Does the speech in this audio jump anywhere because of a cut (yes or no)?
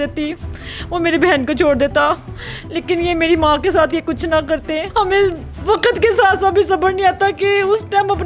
yes